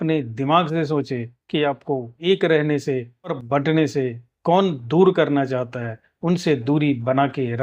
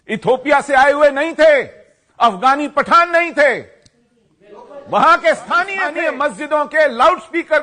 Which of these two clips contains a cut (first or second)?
second